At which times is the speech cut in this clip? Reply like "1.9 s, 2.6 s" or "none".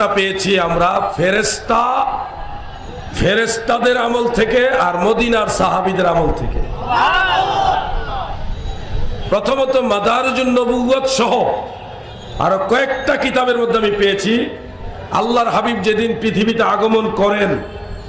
none